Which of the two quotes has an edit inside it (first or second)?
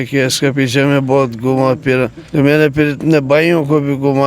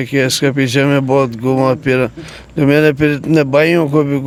first